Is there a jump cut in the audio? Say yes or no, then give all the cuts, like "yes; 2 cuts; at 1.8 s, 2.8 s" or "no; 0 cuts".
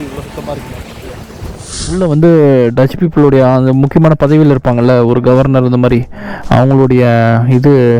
yes; 1 cut; at 2.0 s